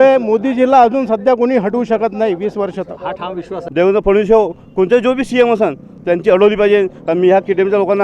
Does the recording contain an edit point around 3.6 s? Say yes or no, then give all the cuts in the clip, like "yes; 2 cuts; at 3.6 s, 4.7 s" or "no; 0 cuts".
yes; 1 cut; at 3.6 s